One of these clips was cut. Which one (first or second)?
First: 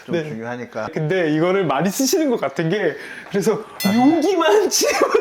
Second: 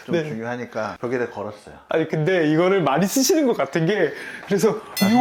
first